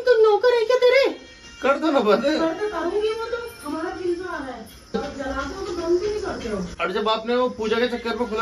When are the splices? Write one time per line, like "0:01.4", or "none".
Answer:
none